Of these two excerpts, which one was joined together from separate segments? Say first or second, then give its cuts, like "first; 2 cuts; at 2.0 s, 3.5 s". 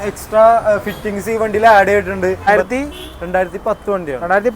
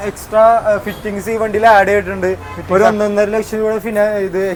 first; 1 cut; at 2.5 s